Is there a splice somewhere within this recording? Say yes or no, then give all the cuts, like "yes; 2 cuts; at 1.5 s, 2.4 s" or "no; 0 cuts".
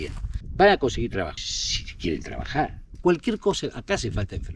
no; 0 cuts